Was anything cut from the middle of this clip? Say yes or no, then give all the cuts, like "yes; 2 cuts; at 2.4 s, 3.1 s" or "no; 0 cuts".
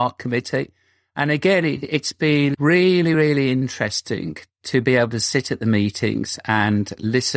no; 0 cuts